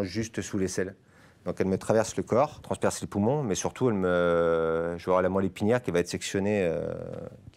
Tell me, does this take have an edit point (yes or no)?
no